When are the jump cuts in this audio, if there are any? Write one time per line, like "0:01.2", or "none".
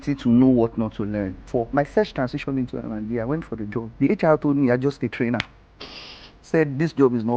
0:01.5
0:03.9

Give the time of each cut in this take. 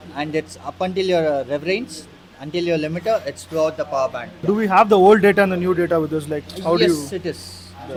none

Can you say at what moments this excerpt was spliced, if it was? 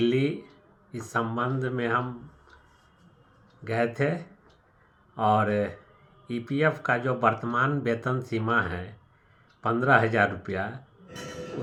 none

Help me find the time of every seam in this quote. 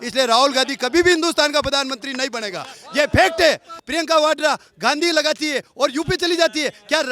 0:03.8

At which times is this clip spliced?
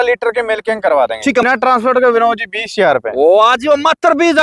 0:01.4

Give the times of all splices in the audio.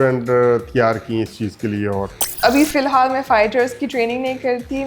0:02.2

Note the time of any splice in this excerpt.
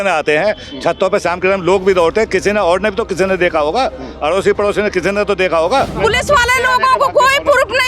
0:05.9

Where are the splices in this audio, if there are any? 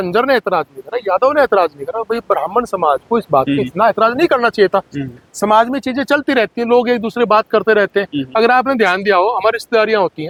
none

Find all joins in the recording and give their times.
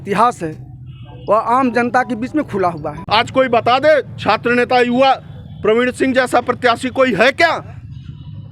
0:02.9

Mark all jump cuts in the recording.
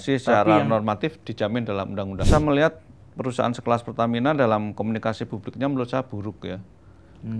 0:02.3

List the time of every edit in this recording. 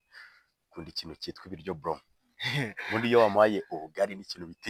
none

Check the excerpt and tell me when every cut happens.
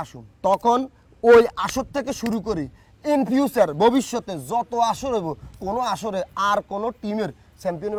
none

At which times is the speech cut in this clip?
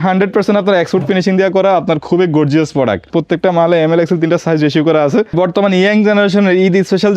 0:03.1
0:05.3

